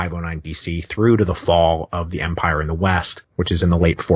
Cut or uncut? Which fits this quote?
cut